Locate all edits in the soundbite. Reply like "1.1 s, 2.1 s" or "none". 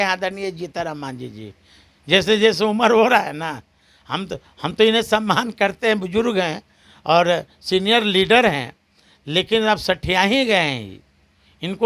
none